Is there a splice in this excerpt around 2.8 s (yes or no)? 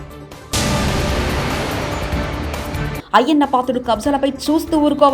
yes